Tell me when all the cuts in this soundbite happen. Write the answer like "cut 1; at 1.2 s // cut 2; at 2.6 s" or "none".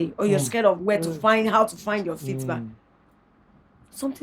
none